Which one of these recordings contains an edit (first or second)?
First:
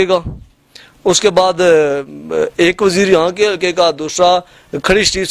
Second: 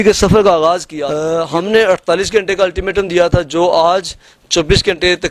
second